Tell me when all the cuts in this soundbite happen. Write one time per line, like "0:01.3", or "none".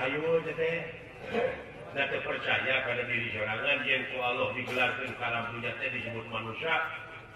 0:01.3